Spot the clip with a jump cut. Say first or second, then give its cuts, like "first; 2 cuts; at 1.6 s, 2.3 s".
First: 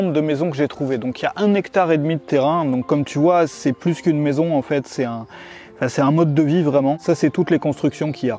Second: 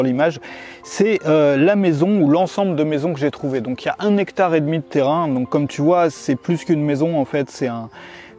first; 1 cut; at 7.0 s